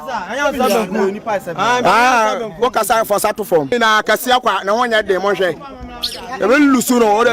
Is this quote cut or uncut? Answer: cut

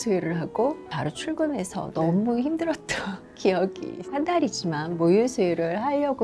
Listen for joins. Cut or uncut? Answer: cut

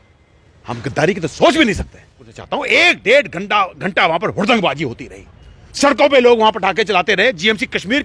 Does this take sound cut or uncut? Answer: cut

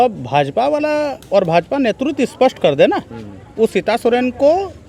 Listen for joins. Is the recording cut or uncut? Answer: uncut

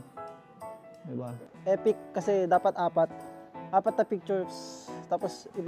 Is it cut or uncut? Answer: cut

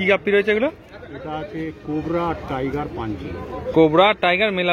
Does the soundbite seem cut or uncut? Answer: uncut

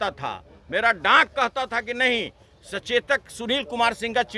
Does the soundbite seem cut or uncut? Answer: uncut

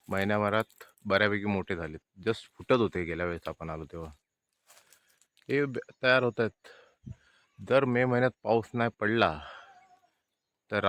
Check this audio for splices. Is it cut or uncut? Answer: uncut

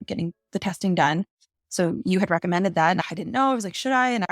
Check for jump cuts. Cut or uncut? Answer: cut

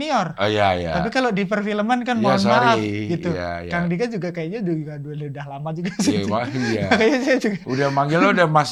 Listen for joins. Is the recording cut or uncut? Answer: uncut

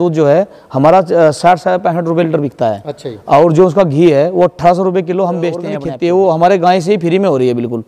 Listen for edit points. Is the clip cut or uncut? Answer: cut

